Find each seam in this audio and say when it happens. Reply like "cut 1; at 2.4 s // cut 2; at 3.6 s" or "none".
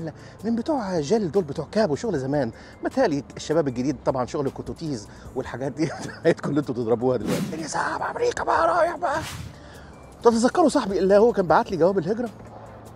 cut 1; at 7.5 s // cut 2; at 9.4 s